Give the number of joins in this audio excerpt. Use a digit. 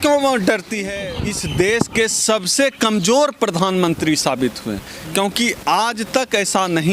1